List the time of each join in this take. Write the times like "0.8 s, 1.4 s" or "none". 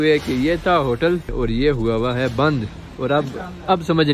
1.3 s